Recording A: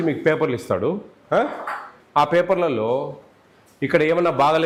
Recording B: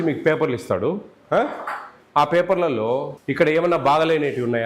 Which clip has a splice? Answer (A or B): B